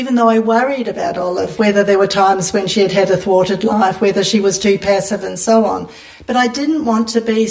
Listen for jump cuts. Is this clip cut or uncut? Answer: uncut